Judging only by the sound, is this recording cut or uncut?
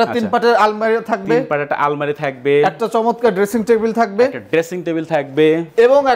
uncut